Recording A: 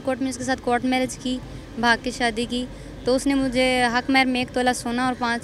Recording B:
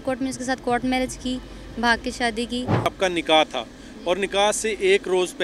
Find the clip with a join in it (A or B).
B